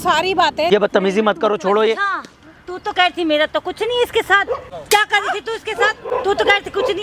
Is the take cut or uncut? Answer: cut